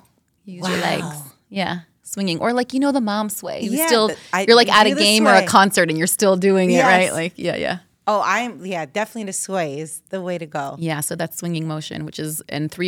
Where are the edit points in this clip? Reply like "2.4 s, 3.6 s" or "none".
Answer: none

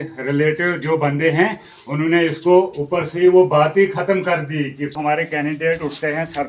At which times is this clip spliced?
4.9 s

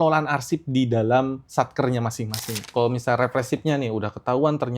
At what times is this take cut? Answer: 2.7 s

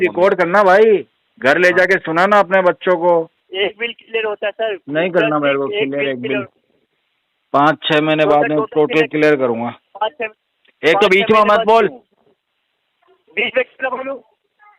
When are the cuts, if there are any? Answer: 3.4 s

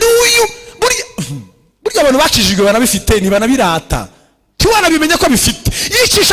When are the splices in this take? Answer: none

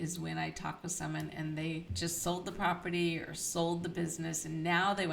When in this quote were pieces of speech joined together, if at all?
1.9 s

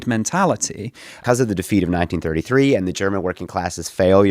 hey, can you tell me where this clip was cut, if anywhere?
1.1 s

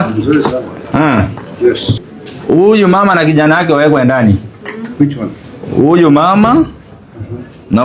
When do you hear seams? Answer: 1.9 s

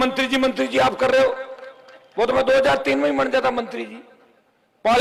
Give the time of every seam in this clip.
none

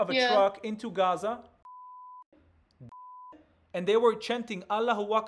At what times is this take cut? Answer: none

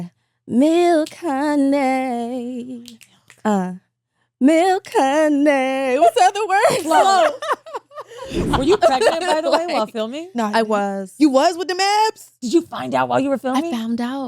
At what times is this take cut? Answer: 8.4 s, 12.3 s

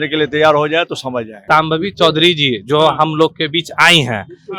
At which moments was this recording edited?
1.4 s

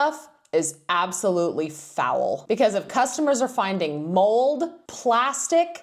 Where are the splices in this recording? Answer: 2.4 s, 4.8 s

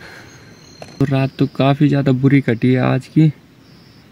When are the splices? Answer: 1.0 s

